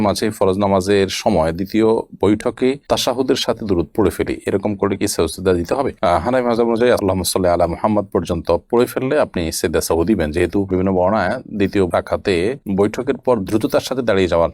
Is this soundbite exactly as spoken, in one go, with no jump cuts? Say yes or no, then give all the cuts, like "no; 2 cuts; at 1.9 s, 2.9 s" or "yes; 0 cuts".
yes; 0 cuts